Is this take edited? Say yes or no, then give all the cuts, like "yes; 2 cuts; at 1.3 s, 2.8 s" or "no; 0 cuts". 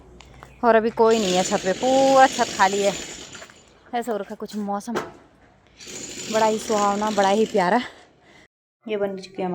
yes; 1 cut; at 8.6 s